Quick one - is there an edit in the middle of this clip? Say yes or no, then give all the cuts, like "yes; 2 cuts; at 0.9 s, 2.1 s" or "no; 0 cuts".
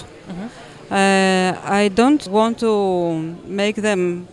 yes; 1 cut; at 2.3 s